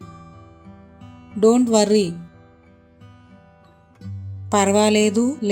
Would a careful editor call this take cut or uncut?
cut